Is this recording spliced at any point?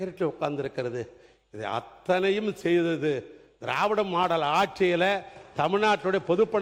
no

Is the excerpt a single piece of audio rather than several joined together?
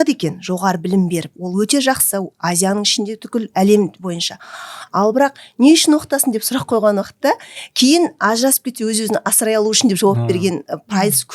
yes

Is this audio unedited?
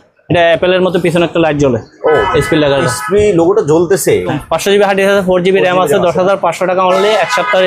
no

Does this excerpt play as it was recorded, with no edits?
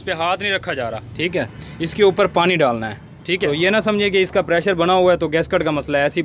no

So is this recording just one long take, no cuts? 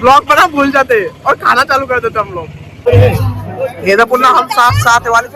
no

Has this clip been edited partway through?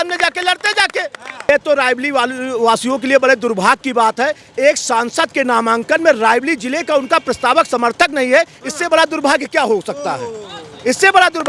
yes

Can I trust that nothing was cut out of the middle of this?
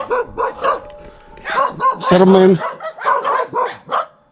yes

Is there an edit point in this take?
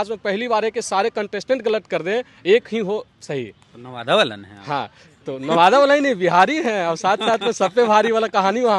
no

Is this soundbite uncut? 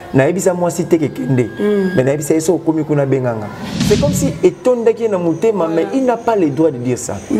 no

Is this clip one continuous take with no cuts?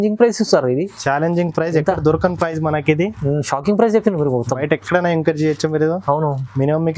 yes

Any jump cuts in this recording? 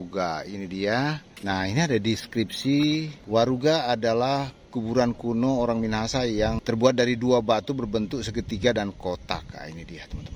yes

